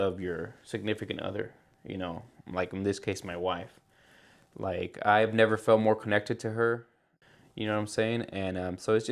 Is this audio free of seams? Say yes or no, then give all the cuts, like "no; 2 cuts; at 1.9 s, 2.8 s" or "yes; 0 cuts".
no; 1 cut; at 7.2 s